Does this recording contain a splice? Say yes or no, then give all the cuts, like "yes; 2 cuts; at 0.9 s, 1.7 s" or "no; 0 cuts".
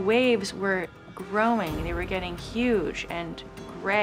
no; 0 cuts